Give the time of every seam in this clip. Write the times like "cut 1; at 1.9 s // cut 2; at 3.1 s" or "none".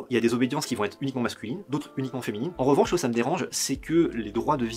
cut 1; at 2.5 s